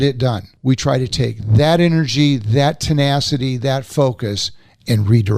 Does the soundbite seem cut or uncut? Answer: uncut